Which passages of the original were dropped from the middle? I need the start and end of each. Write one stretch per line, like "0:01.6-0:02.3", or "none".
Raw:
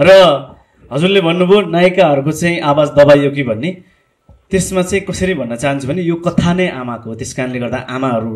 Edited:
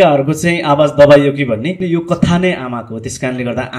0:03.8-0:06.0